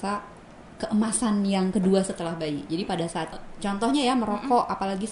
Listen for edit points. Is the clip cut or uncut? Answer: cut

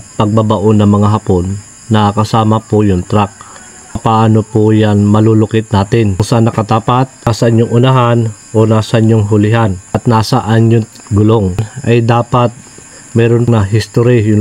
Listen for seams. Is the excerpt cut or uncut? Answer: cut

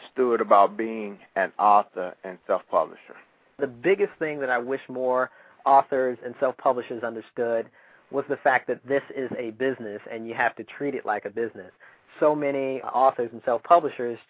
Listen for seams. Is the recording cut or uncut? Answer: uncut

